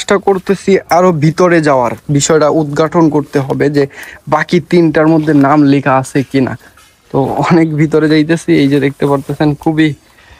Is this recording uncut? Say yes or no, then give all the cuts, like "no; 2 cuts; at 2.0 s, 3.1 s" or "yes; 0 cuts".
yes; 0 cuts